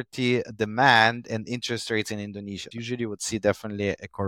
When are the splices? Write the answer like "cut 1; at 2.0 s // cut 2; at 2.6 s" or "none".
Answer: cut 1; at 2.7 s

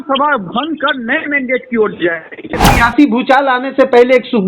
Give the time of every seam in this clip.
cut 1; at 2.7 s

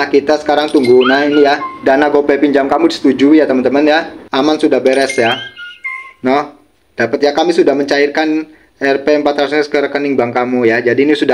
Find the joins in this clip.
cut 1; at 1.7 s // cut 2; at 4.2 s

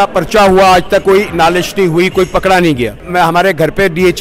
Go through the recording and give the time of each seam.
cut 1; at 1.0 s // cut 2; at 3.0 s

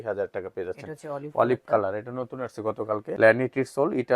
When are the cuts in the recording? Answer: cut 1; at 3.1 s

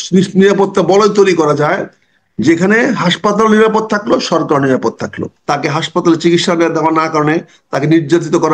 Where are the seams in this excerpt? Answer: cut 1; at 5.3 s

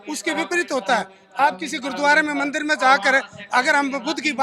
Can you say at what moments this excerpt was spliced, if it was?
none

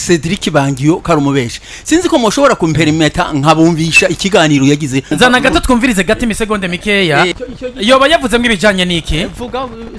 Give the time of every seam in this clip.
cut 1; at 5.1 s // cut 2; at 7.3 s

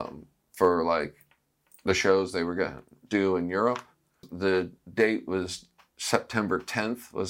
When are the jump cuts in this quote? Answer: cut 1; at 4.3 s

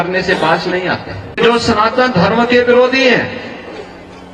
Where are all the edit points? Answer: cut 1; at 1.4 s

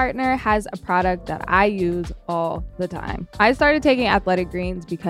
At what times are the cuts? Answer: cut 1; at 3.2 s

